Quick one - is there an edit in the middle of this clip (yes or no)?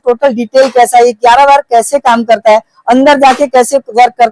no